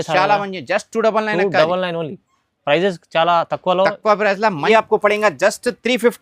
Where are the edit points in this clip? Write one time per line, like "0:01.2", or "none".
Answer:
0:04.6